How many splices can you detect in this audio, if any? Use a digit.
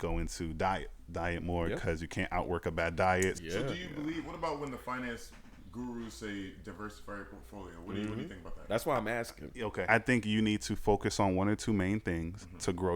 2